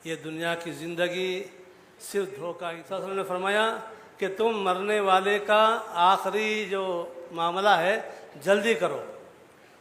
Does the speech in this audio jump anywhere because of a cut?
yes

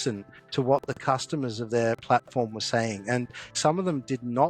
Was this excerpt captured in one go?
no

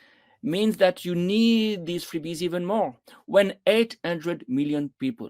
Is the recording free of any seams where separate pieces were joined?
yes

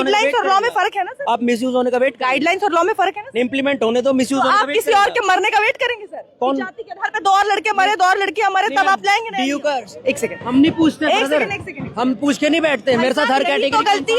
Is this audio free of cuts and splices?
no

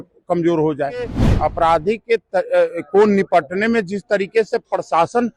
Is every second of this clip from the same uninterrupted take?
no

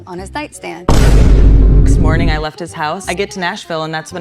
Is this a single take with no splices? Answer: no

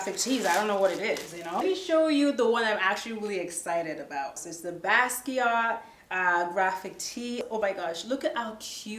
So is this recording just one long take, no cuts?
no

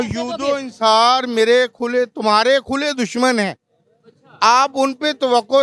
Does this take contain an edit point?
no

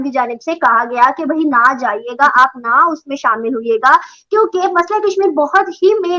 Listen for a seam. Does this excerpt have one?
no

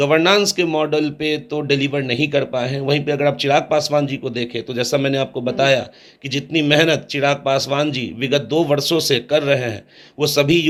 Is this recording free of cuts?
yes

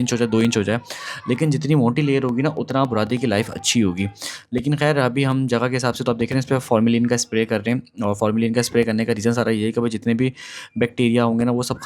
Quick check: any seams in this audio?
no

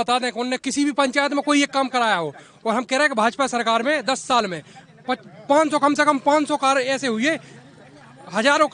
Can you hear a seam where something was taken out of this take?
no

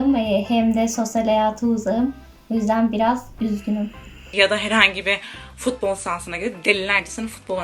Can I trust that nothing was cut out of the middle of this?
no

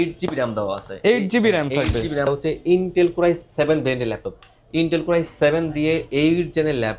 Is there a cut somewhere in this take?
yes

